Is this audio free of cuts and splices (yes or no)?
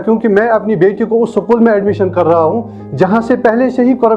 yes